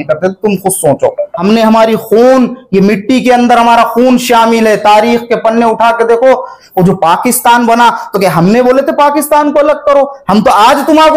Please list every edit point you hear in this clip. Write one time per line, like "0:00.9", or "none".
0:01.3
0:06.6